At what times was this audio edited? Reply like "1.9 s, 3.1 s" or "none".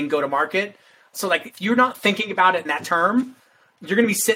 1.1 s, 2.8 s